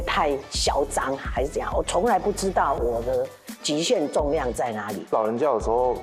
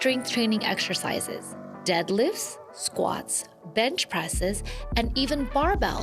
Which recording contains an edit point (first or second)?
first